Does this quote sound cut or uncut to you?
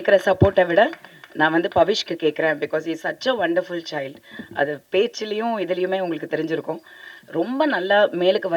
uncut